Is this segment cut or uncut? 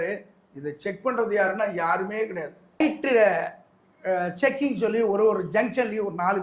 cut